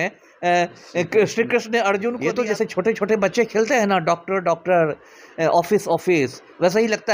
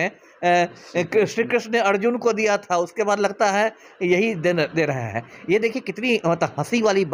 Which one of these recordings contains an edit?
first; 1 cut; at 2.4 s

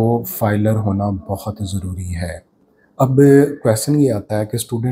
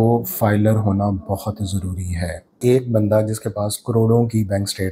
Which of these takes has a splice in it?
second; 1 cut; at 2.6 s

